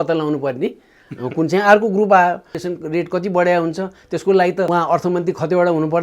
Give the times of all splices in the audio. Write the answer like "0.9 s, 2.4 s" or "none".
2.6 s, 4.7 s